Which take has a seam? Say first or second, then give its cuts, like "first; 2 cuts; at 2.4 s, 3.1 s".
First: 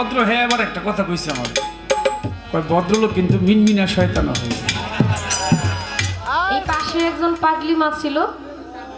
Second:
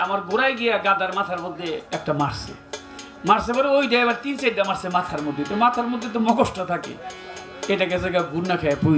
first; 1 cut; at 6.7 s